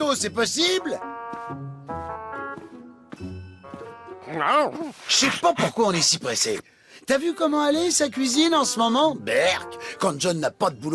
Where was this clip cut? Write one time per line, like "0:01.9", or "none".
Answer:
0:05.1